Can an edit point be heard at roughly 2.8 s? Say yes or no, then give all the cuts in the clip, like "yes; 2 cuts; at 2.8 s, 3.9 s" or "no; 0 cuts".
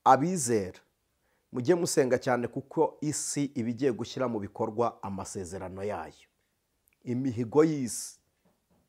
no; 0 cuts